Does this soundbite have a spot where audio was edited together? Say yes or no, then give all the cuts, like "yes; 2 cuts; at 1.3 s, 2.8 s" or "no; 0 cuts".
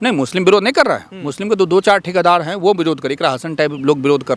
no; 0 cuts